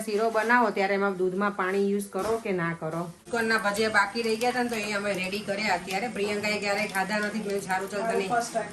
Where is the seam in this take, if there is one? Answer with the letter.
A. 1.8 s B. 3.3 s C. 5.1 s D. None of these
B